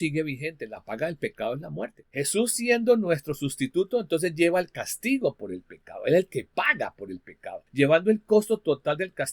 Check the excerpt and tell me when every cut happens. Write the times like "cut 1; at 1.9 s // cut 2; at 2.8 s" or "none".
cut 1; at 2.0 s // cut 2; at 7.6 s